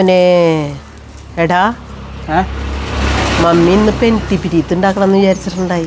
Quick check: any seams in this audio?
no; 0 cuts

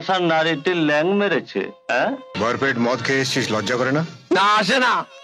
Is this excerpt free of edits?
no; 1 cut; at 2.4 s

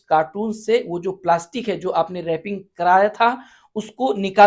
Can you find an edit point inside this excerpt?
no; 0 cuts

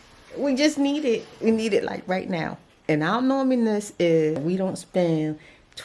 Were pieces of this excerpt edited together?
yes; 1 cut; at 4.4 s

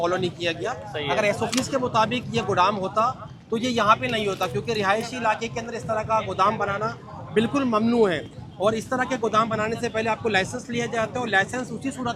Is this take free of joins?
yes; 0 cuts

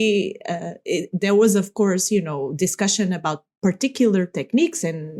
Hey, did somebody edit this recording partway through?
no; 0 cuts

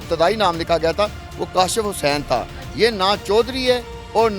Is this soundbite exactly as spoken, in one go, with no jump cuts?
yes; 0 cuts

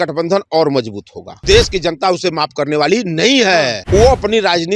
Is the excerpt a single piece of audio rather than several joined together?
no; 2 cuts; at 1.4 s, 3.8 s

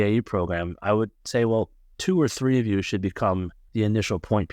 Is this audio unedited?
no; 2 cuts; at 1.8 s, 3.6 s

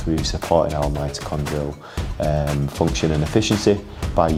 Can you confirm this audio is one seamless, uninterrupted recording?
yes; 0 cuts

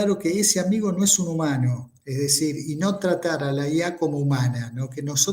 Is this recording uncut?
yes; 0 cuts

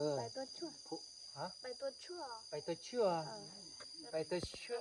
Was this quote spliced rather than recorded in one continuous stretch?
no; 0 cuts

